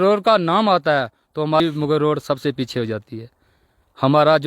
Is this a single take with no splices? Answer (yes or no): no